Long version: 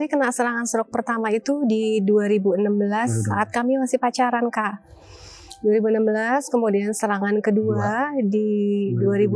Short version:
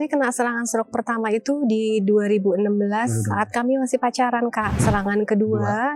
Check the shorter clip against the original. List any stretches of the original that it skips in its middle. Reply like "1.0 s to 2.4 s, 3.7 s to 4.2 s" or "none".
4.8 s to 7.0 s